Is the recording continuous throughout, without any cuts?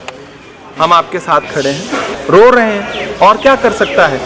no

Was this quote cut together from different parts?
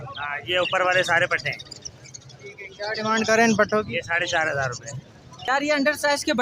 yes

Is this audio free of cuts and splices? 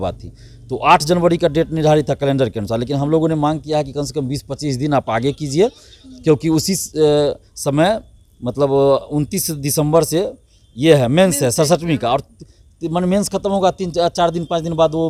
yes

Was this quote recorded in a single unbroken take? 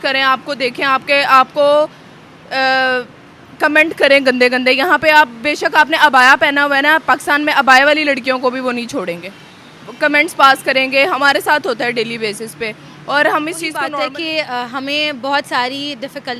no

